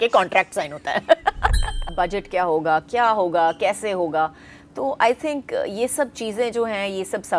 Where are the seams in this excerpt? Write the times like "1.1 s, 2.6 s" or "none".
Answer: 1.9 s